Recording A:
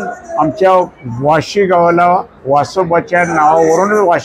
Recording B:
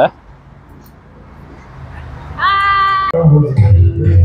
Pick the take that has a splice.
B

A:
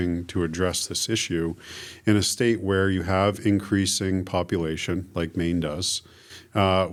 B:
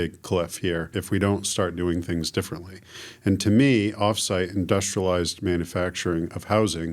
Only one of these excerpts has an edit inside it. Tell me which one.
B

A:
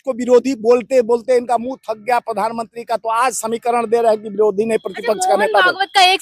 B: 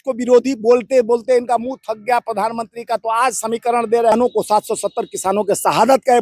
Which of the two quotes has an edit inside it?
B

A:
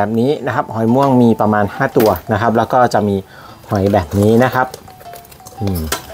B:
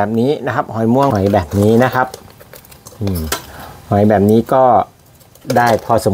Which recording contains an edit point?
B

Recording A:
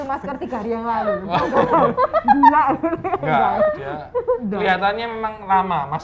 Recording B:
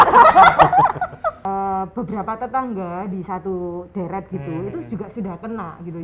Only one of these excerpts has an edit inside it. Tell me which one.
B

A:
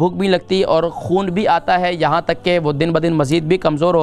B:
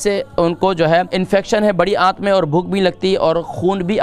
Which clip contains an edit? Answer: B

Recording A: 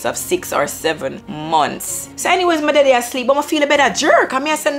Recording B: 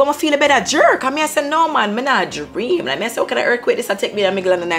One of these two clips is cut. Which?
A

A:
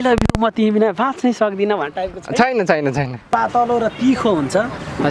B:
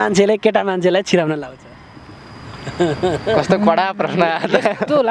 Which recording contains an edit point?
A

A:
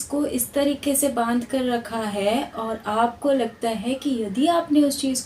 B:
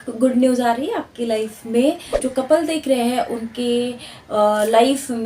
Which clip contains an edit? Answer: B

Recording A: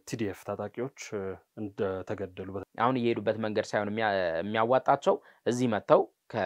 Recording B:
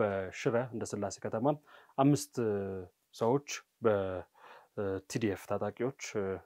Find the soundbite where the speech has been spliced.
A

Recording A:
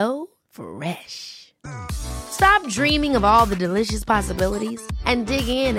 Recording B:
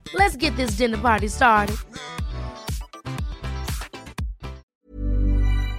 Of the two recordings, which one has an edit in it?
B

